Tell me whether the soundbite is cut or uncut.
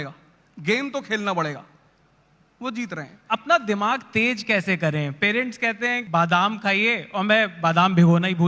cut